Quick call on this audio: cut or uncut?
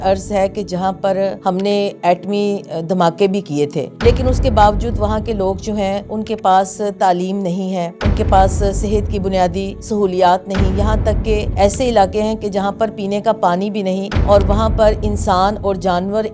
uncut